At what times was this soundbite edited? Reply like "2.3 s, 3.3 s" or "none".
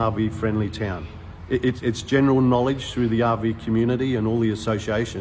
none